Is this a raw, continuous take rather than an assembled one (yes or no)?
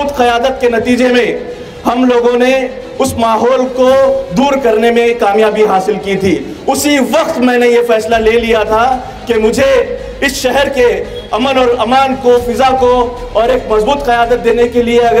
yes